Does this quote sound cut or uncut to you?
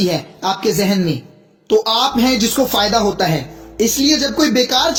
uncut